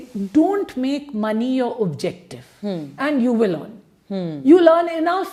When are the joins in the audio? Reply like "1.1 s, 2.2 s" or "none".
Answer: none